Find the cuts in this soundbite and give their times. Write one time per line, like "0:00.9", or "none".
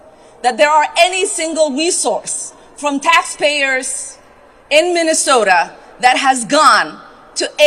none